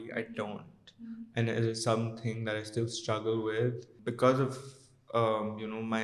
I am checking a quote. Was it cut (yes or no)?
yes